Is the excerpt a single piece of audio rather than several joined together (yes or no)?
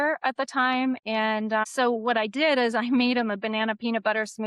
yes